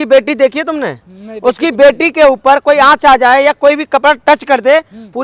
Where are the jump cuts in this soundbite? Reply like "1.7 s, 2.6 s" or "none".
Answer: none